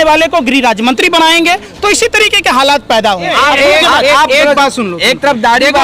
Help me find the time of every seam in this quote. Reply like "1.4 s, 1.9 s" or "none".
3.3 s